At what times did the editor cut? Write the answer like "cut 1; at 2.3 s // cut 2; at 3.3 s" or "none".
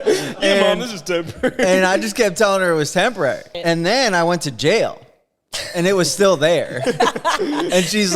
cut 1; at 3.5 s